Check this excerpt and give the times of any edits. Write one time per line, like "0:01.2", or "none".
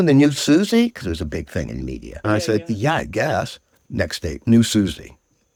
none